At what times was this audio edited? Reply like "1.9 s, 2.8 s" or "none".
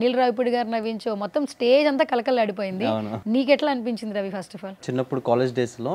3.1 s, 4.8 s

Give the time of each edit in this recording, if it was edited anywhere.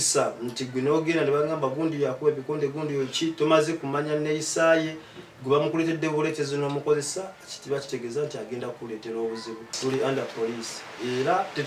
9.8 s

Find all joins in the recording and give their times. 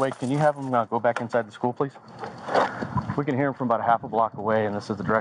2.7 s

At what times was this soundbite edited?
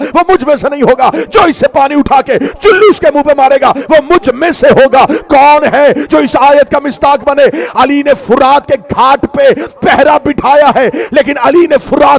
none

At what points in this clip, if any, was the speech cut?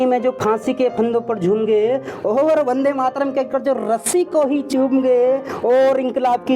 none

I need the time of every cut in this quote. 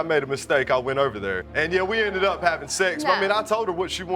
1.5 s

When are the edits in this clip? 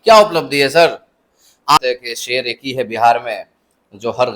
1.8 s

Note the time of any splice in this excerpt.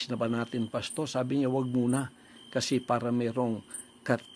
1.6 s

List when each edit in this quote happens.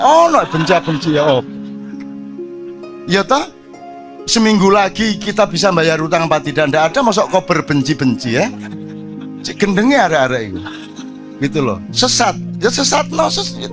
1.4 s, 2.9 s

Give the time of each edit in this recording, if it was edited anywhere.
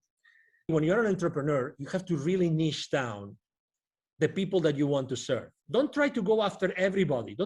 0.7 s, 5.6 s

